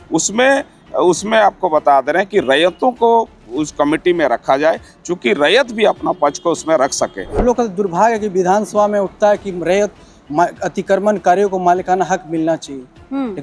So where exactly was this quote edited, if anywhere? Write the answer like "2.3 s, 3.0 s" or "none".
7.4 s